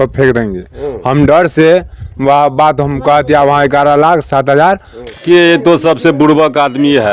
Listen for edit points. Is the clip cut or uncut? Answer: cut